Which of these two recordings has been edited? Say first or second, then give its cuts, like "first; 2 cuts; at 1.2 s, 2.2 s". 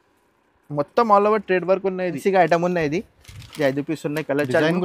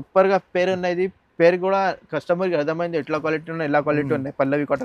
first; 1 cut; at 2.2 s